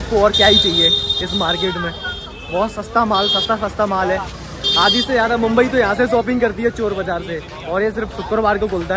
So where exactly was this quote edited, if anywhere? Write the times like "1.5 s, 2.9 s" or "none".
none

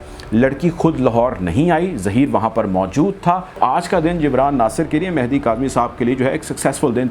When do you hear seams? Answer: 3.6 s

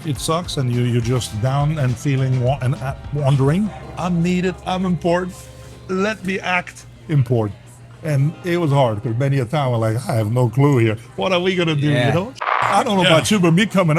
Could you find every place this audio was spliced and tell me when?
3.8 s, 12.4 s

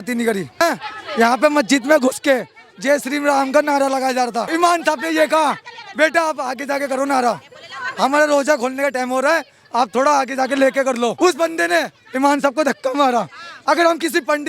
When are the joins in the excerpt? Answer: 1.0 s, 4.5 s, 11.1 s

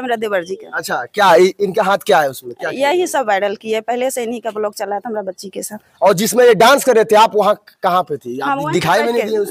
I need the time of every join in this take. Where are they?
none

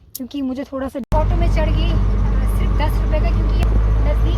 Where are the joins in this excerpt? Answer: 1.0 s

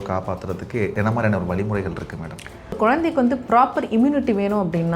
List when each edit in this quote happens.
0.9 s, 2.8 s

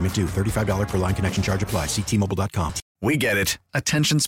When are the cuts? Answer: 2.8 s

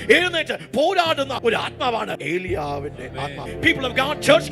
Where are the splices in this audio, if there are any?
1.3 s, 2.2 s, 3.4 s

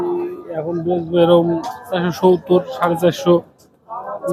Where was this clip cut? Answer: none

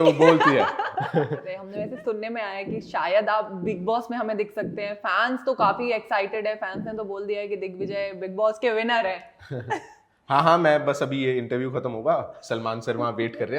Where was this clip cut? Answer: 1.6 s

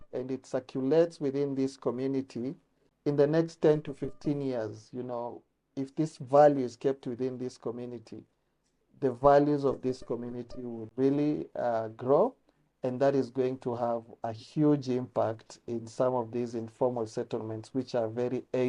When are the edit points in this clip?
2.9 s, 10.9 s

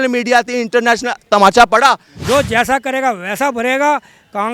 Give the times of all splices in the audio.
2.1 s

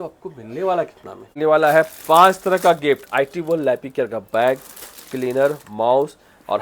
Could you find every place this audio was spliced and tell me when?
1.3 s

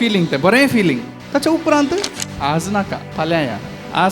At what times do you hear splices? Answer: 1.1 s, 2.2 s, 3.0 s

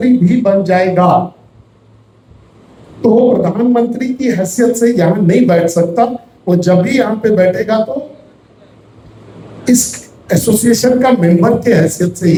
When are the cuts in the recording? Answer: none

